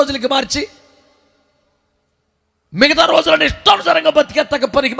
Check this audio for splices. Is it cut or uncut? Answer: uncut